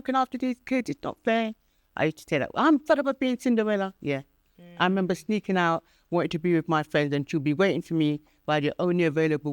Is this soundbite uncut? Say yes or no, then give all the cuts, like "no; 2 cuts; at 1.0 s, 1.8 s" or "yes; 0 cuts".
yes; 0 cuts